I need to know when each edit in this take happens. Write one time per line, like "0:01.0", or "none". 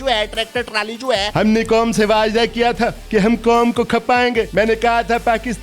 0:01.3
0:03.0
0:04.5